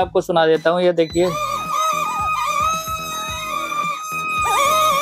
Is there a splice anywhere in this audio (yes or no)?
no